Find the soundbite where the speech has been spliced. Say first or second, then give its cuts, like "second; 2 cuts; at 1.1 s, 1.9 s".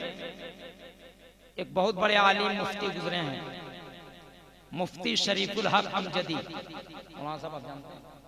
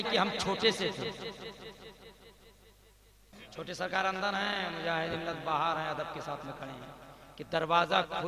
second; 1 cut; at 3.4 s